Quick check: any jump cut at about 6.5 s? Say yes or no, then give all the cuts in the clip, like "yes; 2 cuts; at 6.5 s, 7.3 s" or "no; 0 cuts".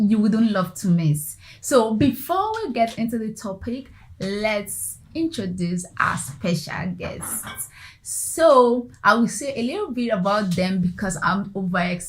no; 1 cut; at 10.9 s